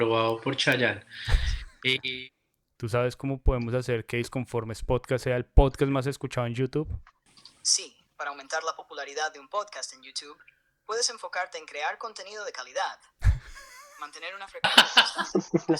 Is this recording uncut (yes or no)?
no